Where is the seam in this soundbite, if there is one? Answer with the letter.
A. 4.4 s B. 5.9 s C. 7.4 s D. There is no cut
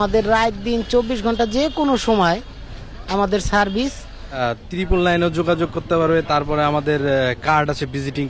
A